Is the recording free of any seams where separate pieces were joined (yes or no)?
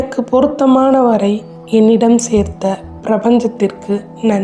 yes